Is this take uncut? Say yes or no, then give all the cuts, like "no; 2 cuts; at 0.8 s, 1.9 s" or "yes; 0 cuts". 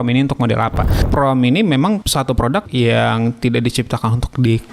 no; 2 cuts; at 1.0 s, 2.3 s